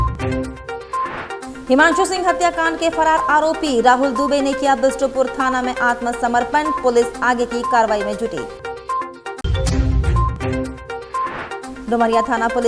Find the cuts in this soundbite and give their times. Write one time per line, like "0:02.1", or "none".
0:01.5